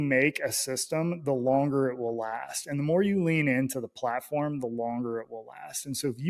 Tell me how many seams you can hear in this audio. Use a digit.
0